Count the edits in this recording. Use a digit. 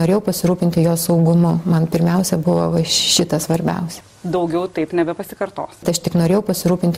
1